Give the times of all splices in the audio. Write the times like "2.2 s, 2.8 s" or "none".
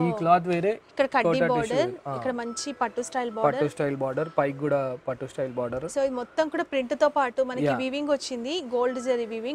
none